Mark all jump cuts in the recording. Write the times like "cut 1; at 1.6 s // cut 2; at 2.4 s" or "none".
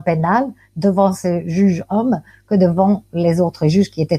none